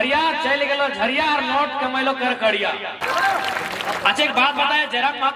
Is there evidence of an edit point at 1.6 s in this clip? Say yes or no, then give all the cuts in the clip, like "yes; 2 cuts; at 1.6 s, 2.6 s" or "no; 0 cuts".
no; 1 cut; at 3.0 s